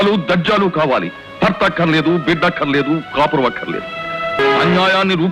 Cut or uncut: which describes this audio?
cut